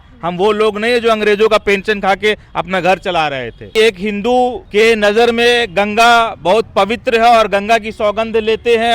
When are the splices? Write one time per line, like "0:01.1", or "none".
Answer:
0:03.7
0:04.6